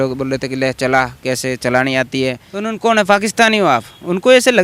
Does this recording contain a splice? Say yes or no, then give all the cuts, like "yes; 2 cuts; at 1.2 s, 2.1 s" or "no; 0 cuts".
yes; 1 cut; at 2.5 s